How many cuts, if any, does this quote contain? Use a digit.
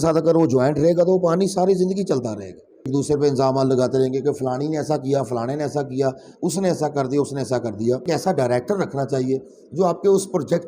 2